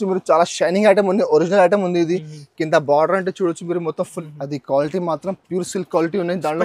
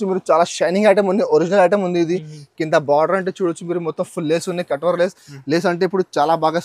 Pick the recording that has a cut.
first; 1 cut; at 4.2 s

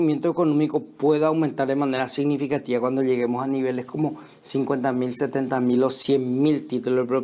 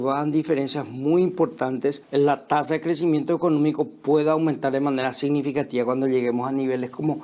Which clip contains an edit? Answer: second; 1 cut; at 2.0 s

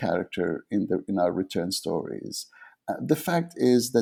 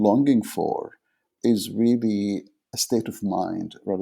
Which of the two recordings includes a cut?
second; 2 cuts; at 1.3 s, 2.6 s

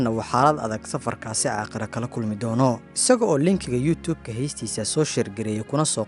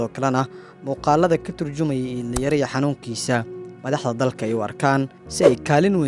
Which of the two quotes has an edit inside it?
first; 1 cut; at 2.9 s

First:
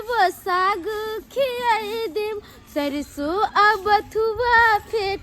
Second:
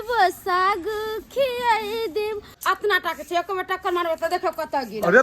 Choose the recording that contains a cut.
second; 1 cut; at 2.5 s

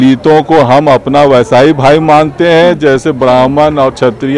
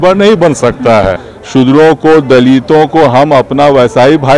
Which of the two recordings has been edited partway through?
second; 1 cut; at 1.3 s

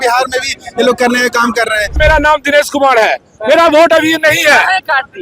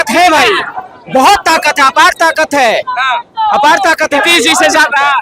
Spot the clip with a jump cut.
first; 1 cut; at 2.0 s

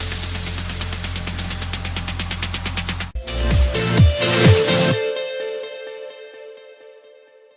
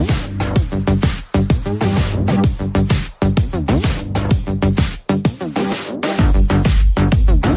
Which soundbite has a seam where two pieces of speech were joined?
first; 1 cut; at 3.1 s

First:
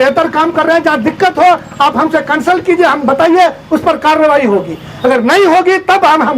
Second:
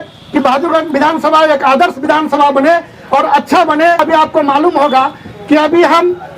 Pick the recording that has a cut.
second; 1 cut; at 4.0 s

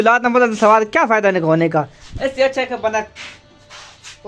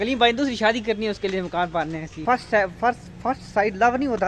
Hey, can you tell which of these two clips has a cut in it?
second; 2 cuts; at 2.2 s, 3.1 s

